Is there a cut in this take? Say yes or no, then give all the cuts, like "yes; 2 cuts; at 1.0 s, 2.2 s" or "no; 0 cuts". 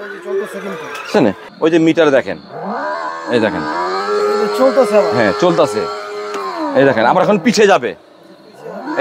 yes; 1 cut; at 1.4 s